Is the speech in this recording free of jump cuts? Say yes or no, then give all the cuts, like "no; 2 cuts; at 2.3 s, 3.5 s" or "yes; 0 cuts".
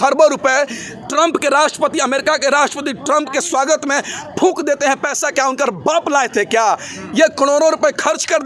yes; 0 cuts